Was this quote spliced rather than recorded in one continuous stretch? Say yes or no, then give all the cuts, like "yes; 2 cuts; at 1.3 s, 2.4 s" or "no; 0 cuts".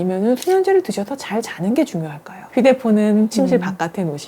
yes; 1 cut; at 2.5 s